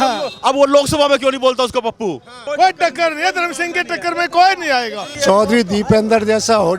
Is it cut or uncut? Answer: cut